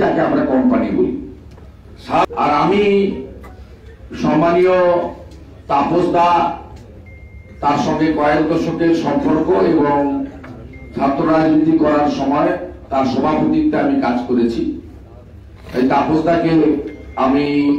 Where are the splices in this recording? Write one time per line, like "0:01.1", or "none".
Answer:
0:02.2